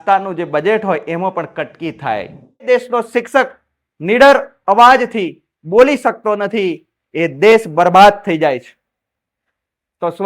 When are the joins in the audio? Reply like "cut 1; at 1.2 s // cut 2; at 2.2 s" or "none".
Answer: cut 1; at 2.6 s